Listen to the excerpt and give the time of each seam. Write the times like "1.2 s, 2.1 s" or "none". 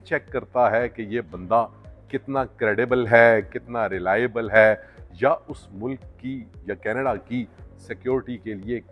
none